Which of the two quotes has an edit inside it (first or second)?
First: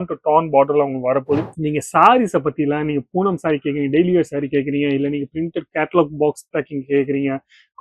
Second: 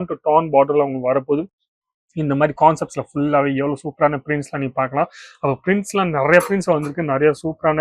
first